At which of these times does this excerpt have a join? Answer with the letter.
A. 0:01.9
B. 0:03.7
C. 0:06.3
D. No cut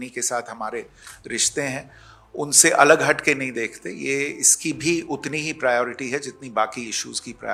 D